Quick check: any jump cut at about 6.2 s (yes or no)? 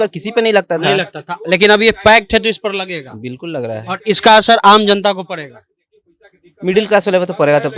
no